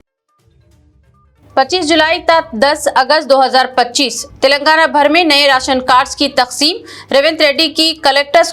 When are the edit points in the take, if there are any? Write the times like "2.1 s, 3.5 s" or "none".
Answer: 1.0 s